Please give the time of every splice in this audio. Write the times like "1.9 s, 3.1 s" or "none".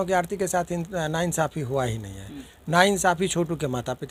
none

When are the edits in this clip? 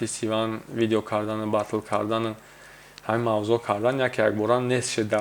none

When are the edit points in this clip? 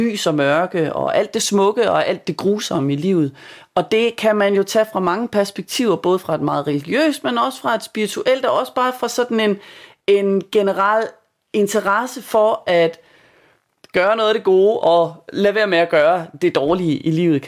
none

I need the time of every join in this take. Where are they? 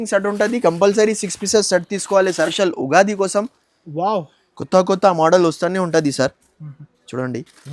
2.5 s

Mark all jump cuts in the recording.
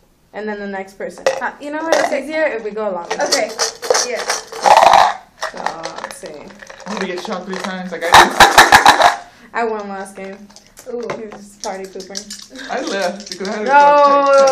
2.7 s

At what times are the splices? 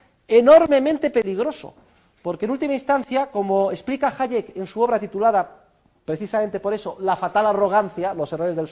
5.0 s

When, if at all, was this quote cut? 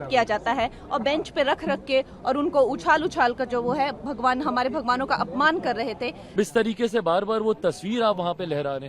6.3 s

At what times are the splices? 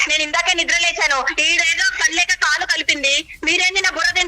none

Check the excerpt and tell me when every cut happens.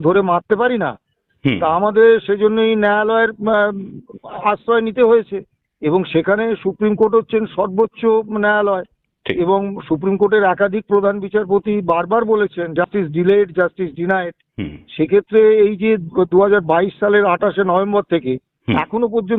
none

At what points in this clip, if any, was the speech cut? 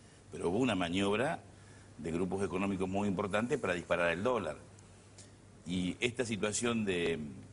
4.4 s

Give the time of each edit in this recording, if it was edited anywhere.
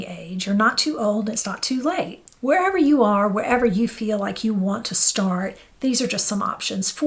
2.2 s

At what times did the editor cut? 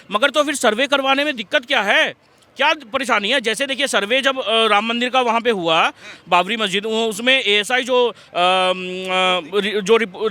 none

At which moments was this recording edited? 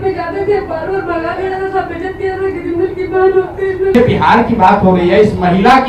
4.0 s

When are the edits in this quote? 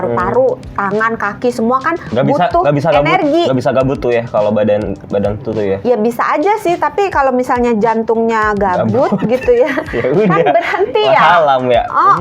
none

